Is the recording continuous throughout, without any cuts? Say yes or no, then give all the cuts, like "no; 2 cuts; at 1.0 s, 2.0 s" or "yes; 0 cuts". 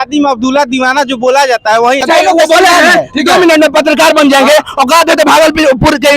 no; 1 cut; at 2.0 s